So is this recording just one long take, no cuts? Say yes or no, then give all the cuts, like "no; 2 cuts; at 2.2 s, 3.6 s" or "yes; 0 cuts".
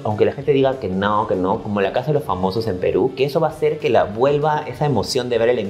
yes; 0 cuts